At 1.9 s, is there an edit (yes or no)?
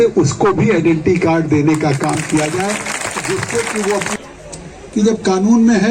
no